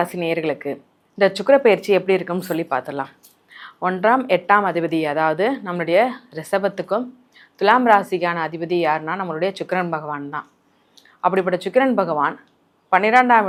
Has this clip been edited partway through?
no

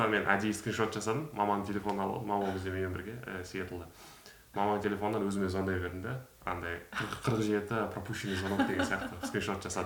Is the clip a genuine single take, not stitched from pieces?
yes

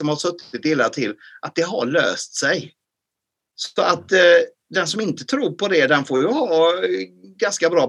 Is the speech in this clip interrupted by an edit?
no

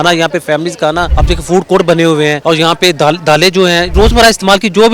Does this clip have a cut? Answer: yes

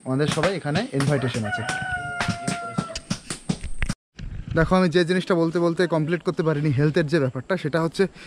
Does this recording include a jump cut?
no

